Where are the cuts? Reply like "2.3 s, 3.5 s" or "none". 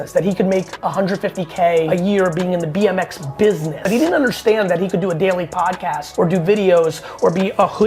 1.9 s, 3.7 s, 6.0 s